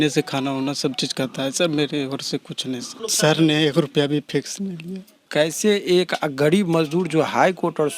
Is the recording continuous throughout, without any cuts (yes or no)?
no